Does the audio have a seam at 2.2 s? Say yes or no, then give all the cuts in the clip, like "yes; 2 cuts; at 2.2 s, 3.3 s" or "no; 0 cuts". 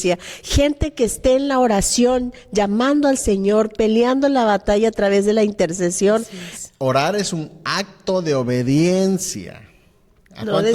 no; 1 cut; at 6.4 s